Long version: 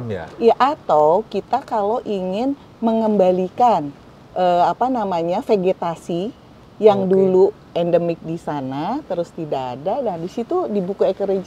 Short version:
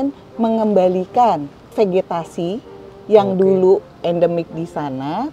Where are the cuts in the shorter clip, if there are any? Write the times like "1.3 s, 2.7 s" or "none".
1.7 s